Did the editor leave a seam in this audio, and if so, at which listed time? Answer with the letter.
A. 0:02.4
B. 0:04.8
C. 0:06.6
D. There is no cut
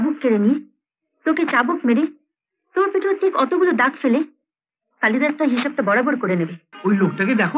C